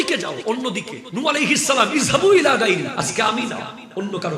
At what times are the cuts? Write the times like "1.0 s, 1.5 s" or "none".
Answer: 1.0 s